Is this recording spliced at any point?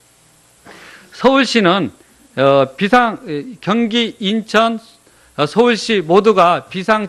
yes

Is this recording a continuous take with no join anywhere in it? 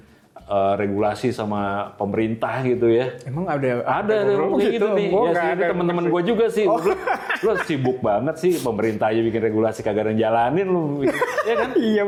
yes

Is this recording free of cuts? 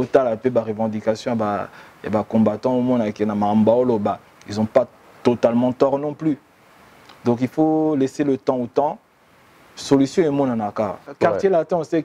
no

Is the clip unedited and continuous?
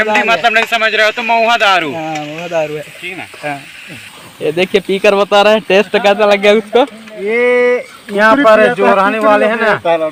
yes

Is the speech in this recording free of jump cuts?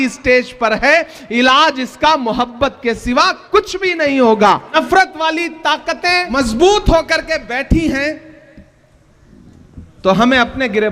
no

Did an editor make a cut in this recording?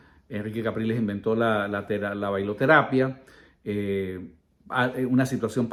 no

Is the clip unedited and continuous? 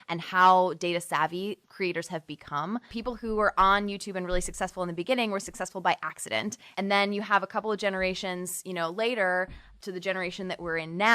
no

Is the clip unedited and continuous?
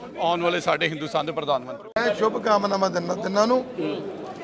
no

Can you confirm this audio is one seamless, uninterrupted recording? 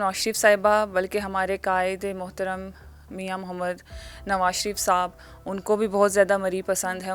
yes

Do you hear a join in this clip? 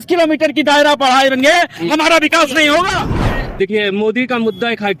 yes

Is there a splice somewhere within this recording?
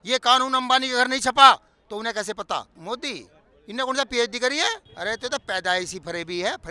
yes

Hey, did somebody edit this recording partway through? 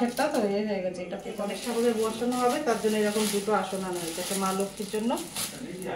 yes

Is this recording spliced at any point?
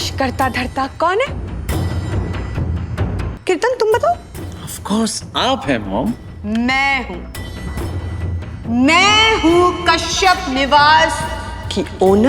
yes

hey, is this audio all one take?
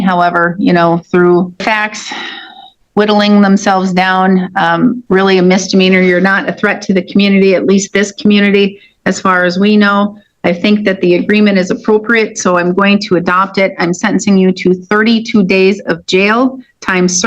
no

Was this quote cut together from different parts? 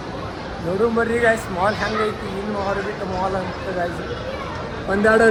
no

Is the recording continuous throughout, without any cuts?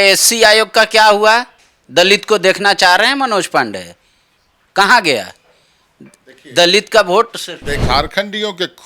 no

